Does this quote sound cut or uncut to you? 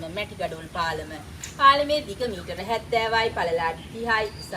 uncut